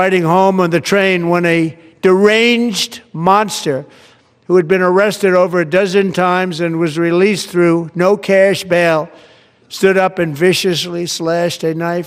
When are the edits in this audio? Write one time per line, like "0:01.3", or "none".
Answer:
none